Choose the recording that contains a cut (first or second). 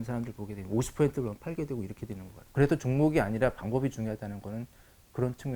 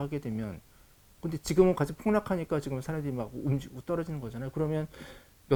first